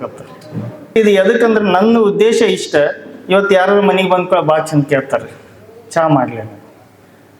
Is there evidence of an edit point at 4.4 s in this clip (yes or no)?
no